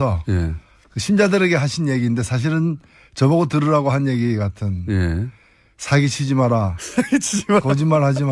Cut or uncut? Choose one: uncut